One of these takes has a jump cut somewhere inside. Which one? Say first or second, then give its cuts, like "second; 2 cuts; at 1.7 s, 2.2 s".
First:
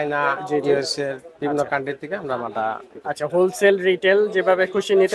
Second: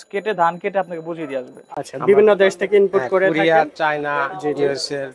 second; 1 cut; at 1.6 s